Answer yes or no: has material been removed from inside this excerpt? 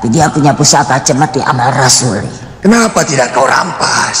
yes